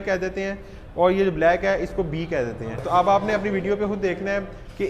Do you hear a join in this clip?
yes; 1 cut; at 2.8 s

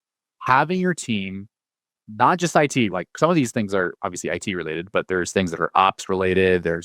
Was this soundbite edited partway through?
yes; 1 cut; at 2.9 s

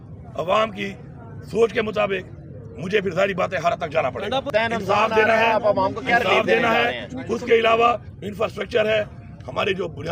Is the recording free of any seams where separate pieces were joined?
no; 1 cut; at 4.5 s

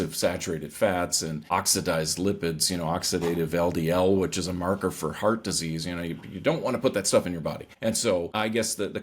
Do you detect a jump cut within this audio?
yes; 3 cuts; at 1.4 s, 7.7 s, 8.3 s

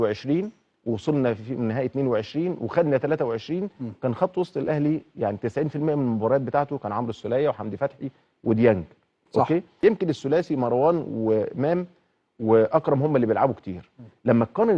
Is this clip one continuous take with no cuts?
no; 1 cut; at 9.7 s

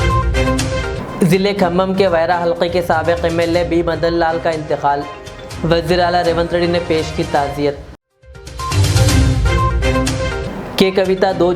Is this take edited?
yes; 1 cut; at 0.9 s

